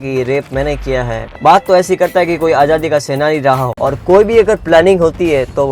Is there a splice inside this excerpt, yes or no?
yes